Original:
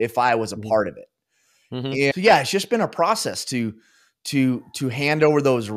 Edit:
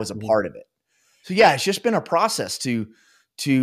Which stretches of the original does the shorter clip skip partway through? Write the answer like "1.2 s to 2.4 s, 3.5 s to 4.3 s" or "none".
1.7 s to 2.2 s